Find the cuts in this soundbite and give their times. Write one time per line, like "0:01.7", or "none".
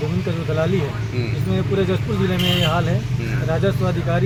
none